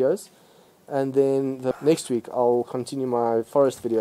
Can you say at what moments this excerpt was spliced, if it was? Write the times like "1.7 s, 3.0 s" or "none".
1.7 s